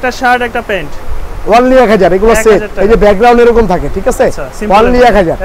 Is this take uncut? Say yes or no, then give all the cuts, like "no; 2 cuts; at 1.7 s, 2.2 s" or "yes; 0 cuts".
yes; 0 cuts